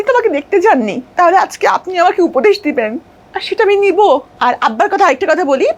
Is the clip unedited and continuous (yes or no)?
no